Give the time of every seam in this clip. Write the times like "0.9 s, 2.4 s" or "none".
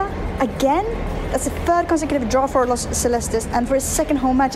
none